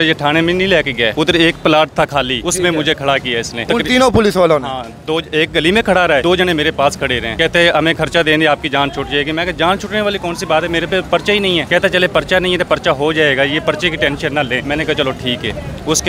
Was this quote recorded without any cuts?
no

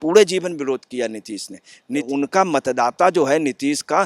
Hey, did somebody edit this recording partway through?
yes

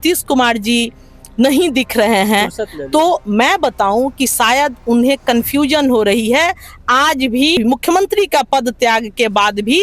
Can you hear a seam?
yes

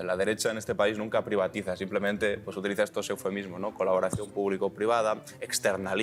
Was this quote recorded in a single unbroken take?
yes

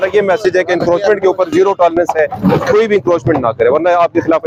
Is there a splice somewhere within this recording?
no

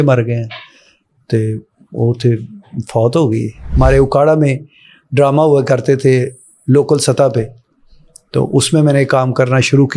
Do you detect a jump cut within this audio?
yes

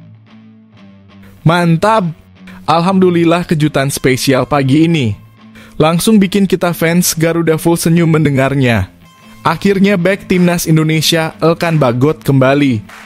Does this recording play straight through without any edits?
yes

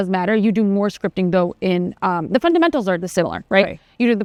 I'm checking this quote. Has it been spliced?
no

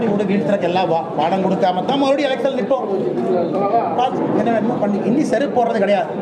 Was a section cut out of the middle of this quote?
no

